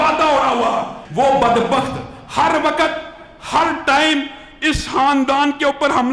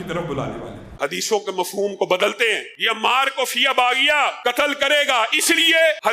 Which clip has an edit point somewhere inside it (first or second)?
second